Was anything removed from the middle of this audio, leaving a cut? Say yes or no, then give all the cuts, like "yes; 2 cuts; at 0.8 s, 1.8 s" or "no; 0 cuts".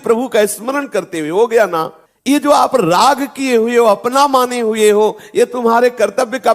no; 0 cuts